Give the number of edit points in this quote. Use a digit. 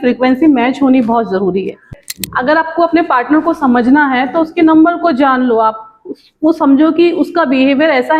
1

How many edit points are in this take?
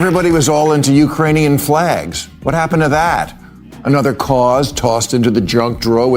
0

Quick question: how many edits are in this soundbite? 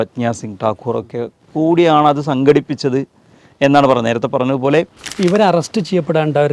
1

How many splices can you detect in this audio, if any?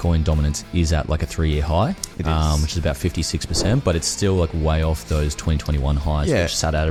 0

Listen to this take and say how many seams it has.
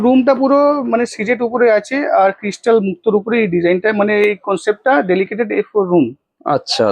0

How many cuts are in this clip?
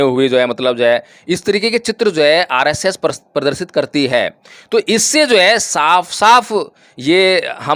0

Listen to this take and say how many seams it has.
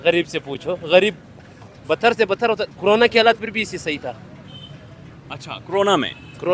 0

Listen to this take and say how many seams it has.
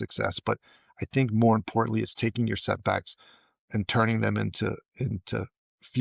0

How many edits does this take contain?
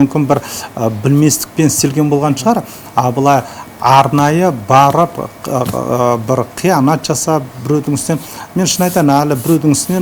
0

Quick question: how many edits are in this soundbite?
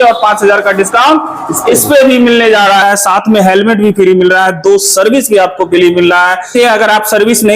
2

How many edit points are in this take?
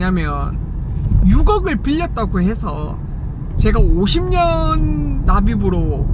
1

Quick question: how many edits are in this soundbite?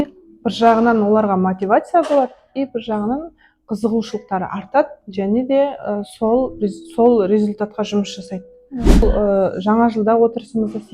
1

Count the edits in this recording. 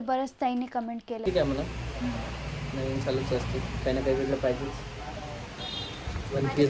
1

